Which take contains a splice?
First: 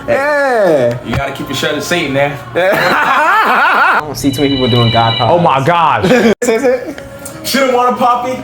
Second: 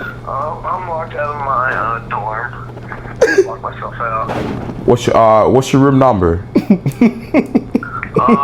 first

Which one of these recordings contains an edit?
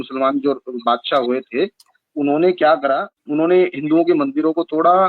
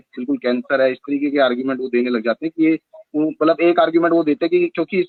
first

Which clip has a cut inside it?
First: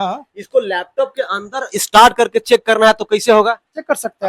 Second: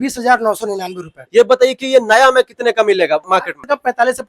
second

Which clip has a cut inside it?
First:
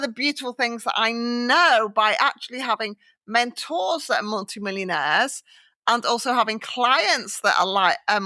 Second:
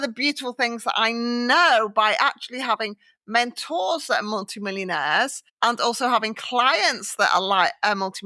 second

